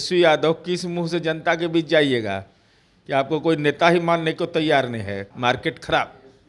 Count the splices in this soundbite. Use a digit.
1